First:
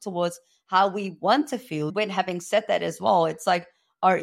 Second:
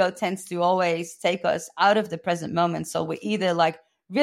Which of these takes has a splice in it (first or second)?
first